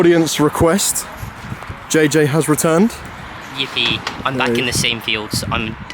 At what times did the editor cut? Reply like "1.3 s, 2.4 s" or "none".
none